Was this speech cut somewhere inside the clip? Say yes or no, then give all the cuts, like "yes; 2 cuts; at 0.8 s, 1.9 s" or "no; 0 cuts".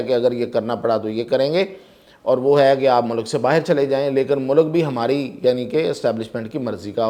no; 0 cuts